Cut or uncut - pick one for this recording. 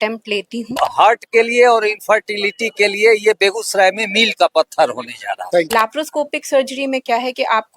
cut